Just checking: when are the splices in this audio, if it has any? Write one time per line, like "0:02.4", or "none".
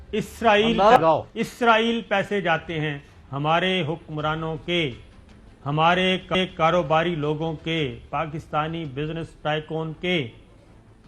0:00.9